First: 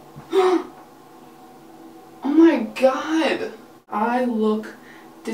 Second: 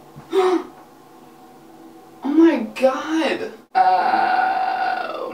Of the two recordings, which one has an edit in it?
first; 1 cut; at 3.6 s

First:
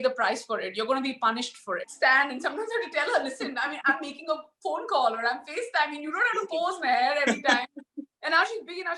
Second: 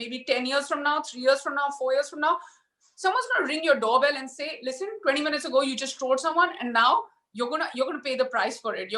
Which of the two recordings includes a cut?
first; 1 cut; at 1.9 s

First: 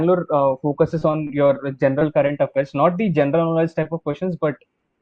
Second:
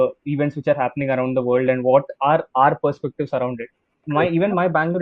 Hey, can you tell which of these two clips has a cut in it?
second; 1 cut; at 4.0 s

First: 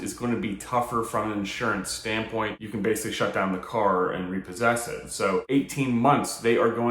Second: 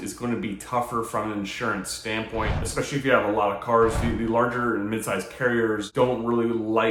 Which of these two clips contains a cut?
first; 2 cuts; at 2.5 s, 5.4 s

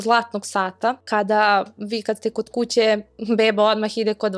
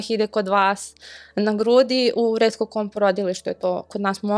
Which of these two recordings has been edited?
first; 1 cut; at 1.1 s

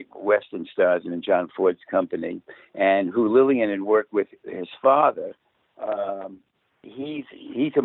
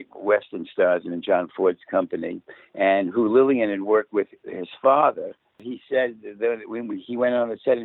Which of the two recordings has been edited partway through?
second; 1 cut; at 5.7 s

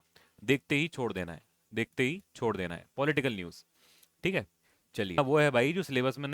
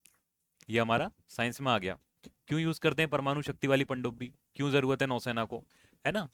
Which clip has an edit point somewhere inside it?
first; 1 cut; at 5.2 s

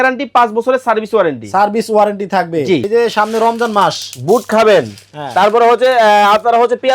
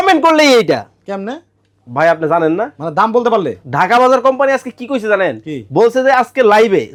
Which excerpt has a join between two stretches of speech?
first; 1 cut; at 2.8 s

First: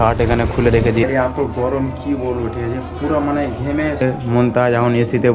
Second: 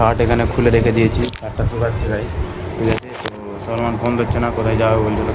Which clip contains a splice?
first; 2 cuts; at 1.0 s, 4.0 s

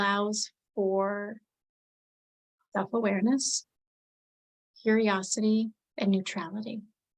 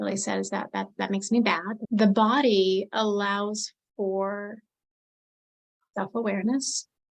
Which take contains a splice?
second; 1 cut; at 1.7 s

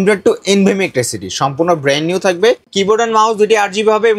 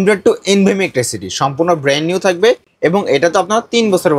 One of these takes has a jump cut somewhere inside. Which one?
first; 1 cut; at 2.7 s

